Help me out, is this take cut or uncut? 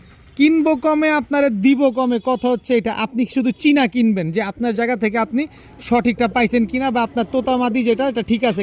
uncut